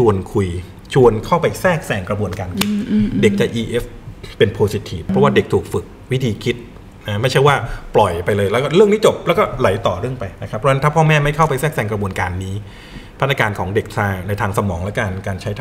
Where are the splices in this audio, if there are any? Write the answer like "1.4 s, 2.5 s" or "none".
5.1 s

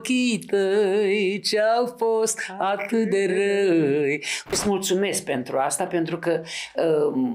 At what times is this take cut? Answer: 4.4 s

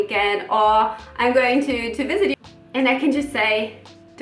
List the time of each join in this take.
2.3 s

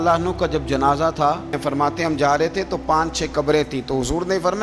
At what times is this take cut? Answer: 1.6 s

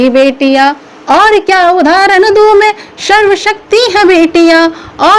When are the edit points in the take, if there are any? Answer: none

